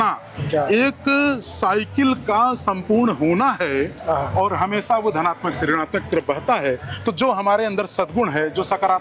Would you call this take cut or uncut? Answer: uncut